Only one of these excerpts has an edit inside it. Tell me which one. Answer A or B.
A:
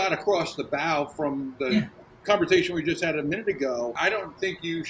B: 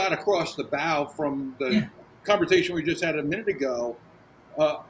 A